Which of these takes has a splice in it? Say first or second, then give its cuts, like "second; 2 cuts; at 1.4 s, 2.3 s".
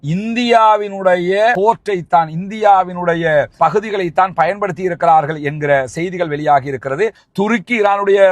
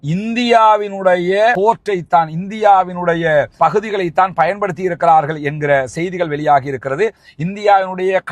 first; 1 cut; at 7.2 s